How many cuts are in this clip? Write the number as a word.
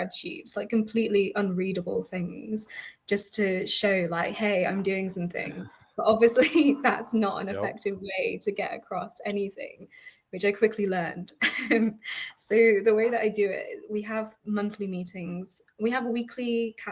zero